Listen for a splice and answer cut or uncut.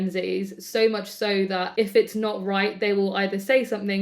cut